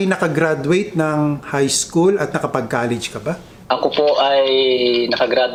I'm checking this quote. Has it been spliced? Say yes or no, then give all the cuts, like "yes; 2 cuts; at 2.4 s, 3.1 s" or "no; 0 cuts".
no; 0 cuts